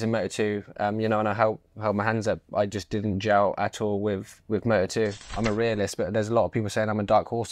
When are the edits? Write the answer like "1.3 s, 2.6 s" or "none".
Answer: 5.3 s